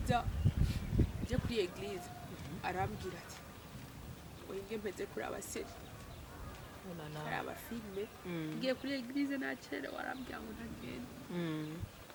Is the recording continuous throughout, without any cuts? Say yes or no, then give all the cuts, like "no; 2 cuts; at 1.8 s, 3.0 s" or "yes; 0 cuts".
yes; 0 cuts